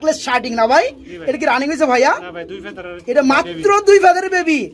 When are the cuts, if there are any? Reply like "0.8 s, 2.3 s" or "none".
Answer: none